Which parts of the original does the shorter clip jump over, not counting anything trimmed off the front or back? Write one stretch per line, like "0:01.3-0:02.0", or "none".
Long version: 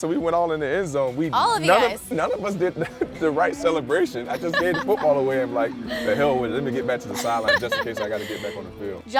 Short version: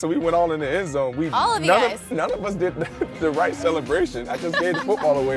none